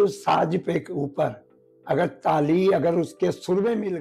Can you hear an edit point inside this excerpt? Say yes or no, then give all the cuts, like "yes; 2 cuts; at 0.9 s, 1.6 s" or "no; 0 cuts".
no; 0 cuts